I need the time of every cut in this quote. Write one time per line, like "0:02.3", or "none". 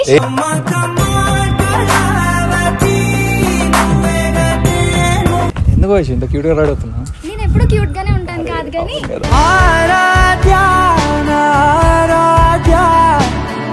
0:05.5